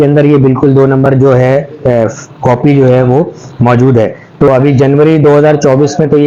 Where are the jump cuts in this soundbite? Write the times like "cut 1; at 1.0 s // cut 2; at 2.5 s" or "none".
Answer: cut 1; at 4.5 s